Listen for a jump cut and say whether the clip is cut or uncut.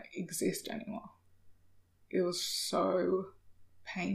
uncut